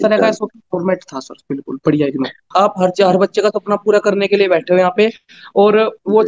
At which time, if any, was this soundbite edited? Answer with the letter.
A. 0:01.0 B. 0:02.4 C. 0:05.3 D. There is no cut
B